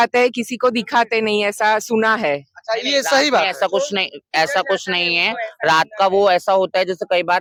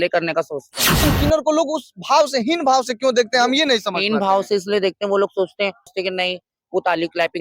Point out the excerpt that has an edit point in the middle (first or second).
second